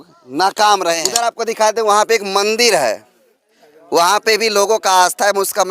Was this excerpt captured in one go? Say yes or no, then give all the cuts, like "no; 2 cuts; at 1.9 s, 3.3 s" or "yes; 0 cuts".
no; 1 cut; at 1.2 s